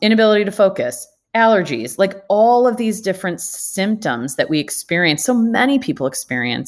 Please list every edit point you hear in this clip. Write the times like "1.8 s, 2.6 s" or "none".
none